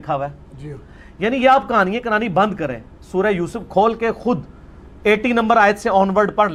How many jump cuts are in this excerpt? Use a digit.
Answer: 0